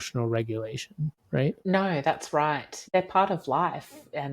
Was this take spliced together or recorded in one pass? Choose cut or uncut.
cut